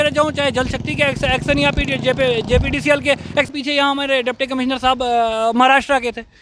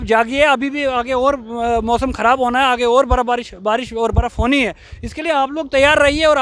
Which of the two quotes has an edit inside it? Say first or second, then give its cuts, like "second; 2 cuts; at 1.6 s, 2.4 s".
first; 1 cut; at 3.5 s